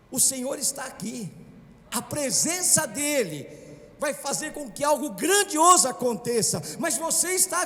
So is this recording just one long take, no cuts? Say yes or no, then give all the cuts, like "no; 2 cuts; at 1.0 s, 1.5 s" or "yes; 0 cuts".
yes; 0 cuts